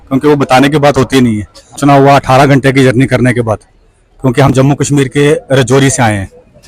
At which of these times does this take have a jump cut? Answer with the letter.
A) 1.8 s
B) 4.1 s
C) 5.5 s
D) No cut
A